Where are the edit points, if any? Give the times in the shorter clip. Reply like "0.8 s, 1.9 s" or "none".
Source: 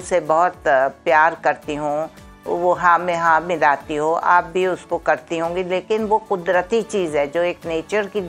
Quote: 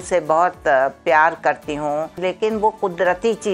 2.2 s